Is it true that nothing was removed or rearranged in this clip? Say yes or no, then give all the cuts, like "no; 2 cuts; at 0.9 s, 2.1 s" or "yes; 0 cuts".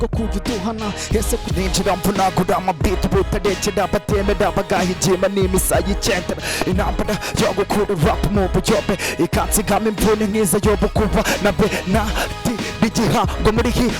no; 1 cut; at 1.5 s